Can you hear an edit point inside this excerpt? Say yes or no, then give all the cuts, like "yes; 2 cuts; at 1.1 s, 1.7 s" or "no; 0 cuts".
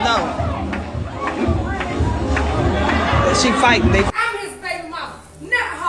yes; 1 cut; at 4.1 s